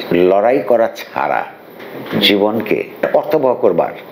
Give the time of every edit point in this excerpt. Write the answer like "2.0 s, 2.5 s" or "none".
2.9 s